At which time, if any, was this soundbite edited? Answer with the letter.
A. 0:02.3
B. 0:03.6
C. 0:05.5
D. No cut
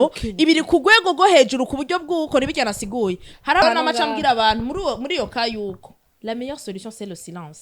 B